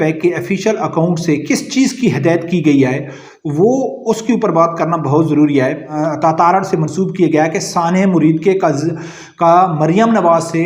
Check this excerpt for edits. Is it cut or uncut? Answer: cut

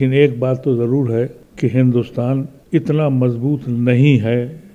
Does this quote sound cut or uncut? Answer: cut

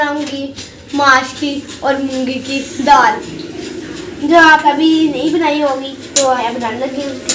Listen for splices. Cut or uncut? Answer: cut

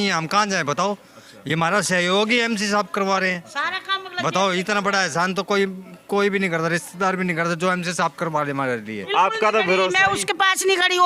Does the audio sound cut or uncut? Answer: cut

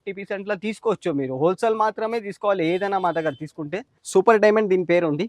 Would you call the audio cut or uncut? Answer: cut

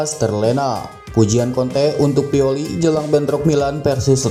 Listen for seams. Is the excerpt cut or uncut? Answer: uncut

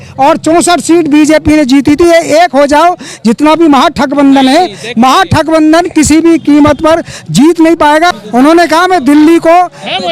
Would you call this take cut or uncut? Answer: cut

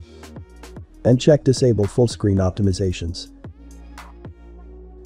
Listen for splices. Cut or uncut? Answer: cut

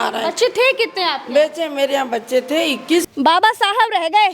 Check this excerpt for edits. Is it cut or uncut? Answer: cut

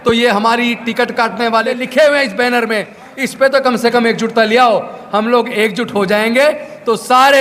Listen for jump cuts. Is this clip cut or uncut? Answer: cut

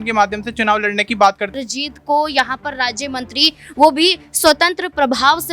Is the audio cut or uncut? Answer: cut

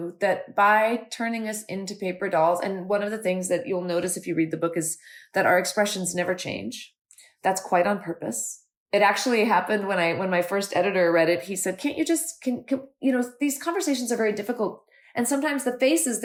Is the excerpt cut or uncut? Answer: uncut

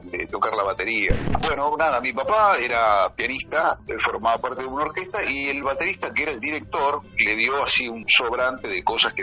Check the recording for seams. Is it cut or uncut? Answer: cut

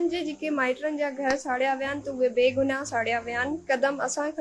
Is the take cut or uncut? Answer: uncut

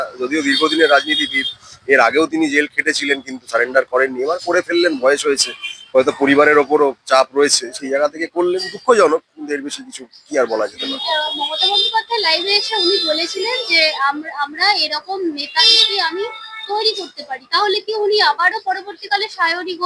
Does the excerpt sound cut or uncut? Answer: uncut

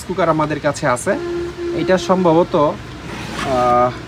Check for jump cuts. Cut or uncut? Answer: uncut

